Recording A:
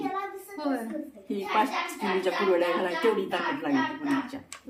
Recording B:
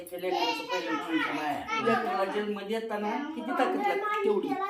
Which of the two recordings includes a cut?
B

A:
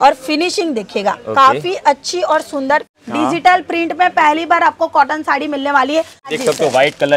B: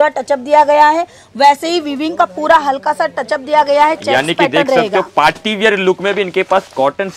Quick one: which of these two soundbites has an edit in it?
A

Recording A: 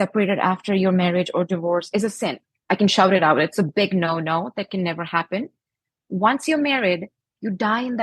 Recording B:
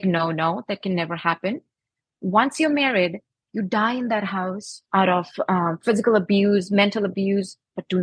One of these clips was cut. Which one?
A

